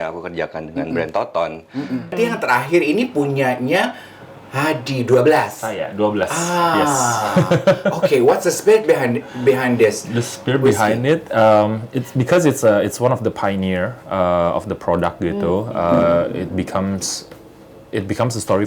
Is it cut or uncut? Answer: cut